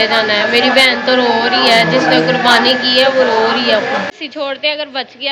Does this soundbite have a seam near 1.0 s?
no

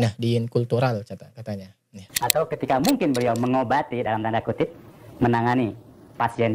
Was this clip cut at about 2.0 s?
yes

